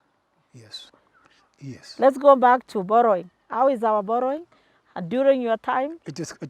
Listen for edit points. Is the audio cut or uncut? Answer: cut